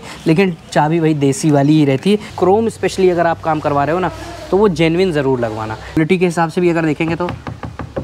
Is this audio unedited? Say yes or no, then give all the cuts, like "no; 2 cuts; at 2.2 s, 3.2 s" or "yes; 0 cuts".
no; 2 cuts; at 2.3 s, 6.0 s